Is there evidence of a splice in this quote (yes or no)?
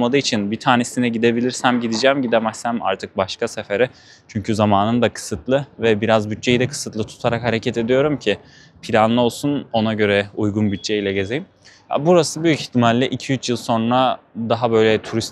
no